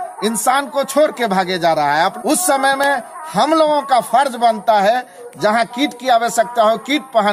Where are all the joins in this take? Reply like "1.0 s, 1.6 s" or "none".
2.2 s, 5.2 s